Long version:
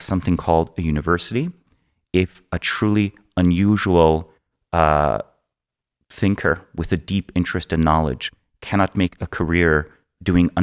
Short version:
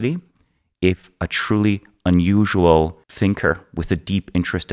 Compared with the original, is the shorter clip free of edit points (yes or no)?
no